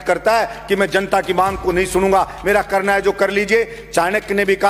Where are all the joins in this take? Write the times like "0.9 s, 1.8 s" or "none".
none